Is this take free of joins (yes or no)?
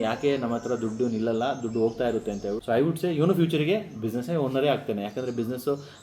no